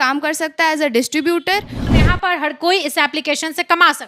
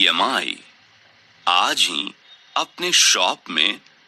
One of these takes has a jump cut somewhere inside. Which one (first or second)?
first